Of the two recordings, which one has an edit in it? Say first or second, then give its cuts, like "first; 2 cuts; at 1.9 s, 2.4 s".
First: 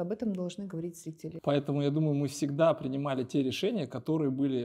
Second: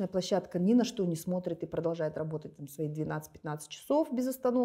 first; 1 cut; at 1.3 s